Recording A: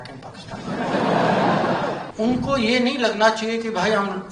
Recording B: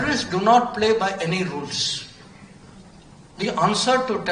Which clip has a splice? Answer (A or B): A